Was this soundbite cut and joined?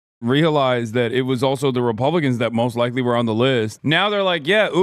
yes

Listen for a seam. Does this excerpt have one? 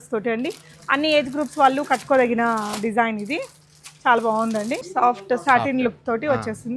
yes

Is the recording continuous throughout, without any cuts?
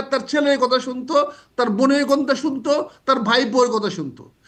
yes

